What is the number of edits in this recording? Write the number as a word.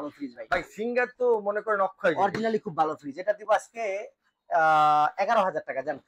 zero